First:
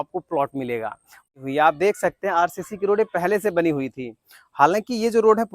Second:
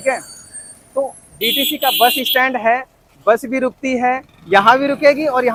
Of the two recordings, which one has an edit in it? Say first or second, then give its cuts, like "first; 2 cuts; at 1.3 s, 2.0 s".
first; 1 cut; at 1.3 s